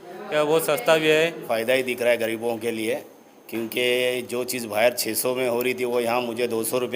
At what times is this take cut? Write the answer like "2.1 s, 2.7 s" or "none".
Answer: 1.5 s